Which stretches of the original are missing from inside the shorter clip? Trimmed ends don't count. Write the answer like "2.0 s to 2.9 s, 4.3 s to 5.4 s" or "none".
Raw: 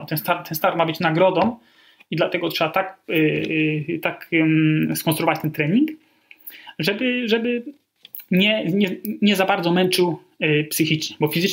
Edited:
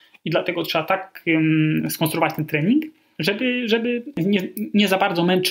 3.0 s to 4.2 s, 6.1 s to 6.6 s, 7.7 s to 8.6 s